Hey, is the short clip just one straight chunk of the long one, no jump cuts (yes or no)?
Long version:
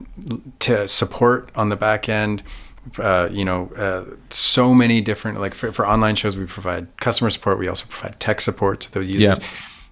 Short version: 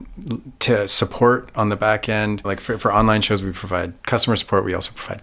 no